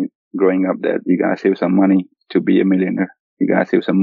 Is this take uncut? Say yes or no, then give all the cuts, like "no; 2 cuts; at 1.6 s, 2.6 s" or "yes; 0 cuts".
yes; 0 cuts